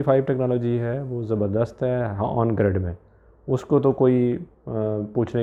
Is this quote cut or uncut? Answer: uncut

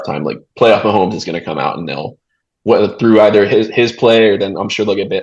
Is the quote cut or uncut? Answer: uncut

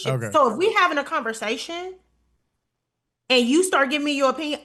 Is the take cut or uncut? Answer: uncut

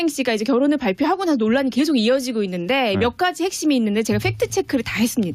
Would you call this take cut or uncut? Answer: cut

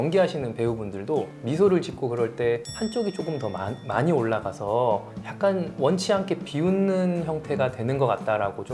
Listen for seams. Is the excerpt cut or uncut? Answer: uncut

